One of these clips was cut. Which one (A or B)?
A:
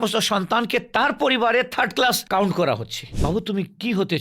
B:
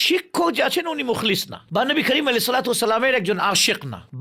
A